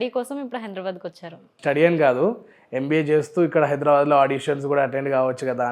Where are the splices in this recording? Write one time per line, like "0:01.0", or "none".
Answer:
0:01.4

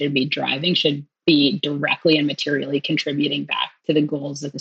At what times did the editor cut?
0:01.1

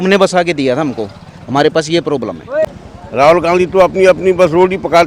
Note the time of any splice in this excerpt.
0:02.7

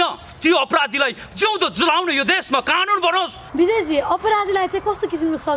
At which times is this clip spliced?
0:03.5

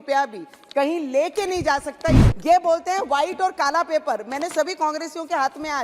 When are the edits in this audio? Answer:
0:02.3

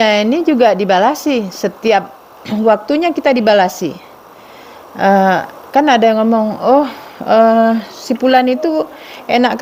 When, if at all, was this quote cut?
none

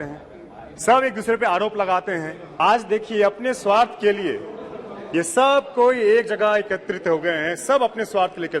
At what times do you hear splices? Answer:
0:02.4

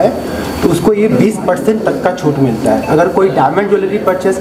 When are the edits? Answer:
none

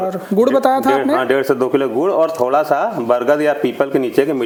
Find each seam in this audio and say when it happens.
none

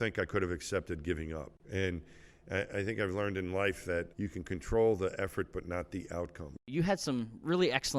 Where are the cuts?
0:01.6
0:04.1
0:06.7

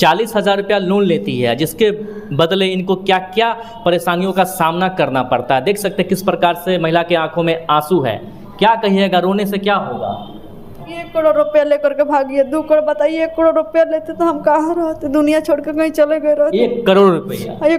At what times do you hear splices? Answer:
0:10.9

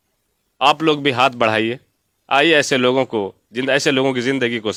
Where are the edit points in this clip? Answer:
none

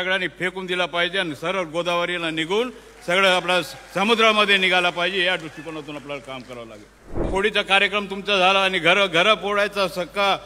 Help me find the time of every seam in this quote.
0:07.2

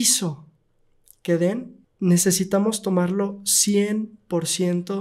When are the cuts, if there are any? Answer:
0:01.8

